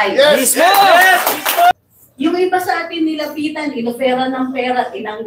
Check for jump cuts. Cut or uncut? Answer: cut